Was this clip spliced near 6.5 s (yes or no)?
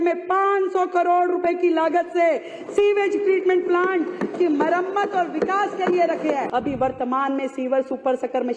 yes